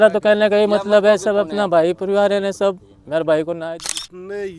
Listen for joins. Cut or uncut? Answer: cut